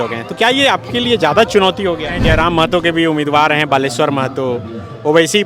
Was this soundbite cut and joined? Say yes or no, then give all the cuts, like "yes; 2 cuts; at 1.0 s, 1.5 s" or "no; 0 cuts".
yes; 1 cut; at 2.2 s